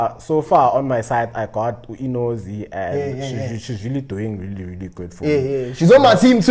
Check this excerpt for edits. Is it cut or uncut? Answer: uncut